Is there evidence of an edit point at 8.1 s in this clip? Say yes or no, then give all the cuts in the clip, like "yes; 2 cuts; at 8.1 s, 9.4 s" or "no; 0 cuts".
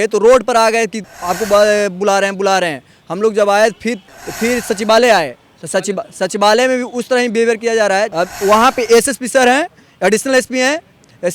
yes; 3 cuts; at 1.0 s, 4.0 s, 8.1 s